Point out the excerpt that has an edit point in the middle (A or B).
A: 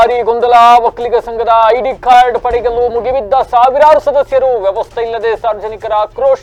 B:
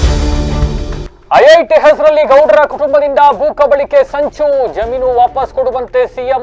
B